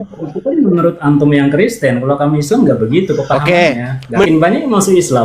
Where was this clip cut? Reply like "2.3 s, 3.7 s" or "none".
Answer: 4.3 s